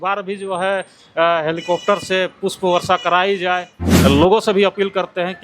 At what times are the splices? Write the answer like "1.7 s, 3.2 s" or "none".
3.8 s